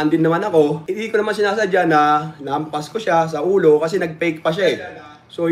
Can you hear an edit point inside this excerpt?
yes; 1 cut; at 1.0 s

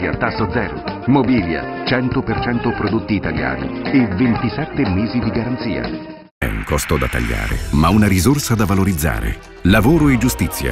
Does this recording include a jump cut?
yes; 1 cut; at 6.4 s

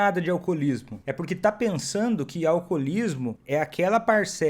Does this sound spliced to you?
yes; 2 cuts; at 1.0 s, 3.4 s

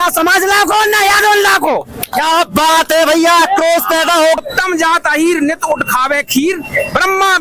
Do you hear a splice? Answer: yes; 1 cut; at 4.4 s

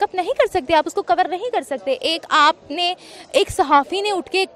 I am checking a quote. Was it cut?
no; 0 cuts

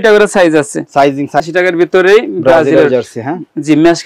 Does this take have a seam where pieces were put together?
yes; 1 cut; at 1.4 s

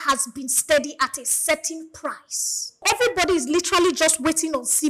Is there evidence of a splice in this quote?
yes; 1 cut; at 2.8 s

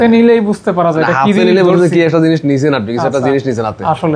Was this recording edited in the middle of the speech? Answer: no; 0 cuts

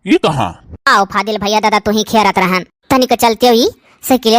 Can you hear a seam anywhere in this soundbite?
no; 0 cuts

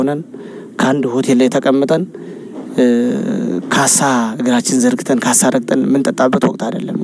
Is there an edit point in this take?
no; 0 cuts

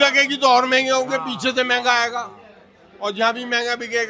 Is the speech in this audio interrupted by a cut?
no; 0 cuts

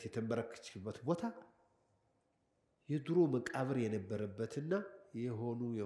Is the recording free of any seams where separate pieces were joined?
yes; 0 cuts

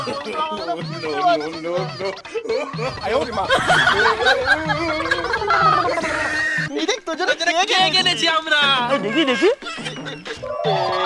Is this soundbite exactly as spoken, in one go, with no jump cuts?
no; 1 cut; at 6.6 s

